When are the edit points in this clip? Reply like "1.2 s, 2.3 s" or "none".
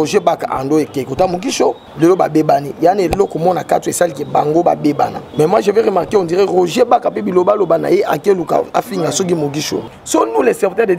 1.9 s, 5.2 s, 9.9 s